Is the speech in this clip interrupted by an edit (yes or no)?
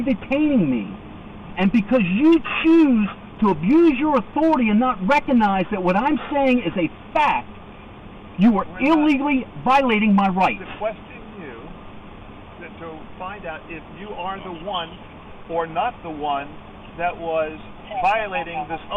no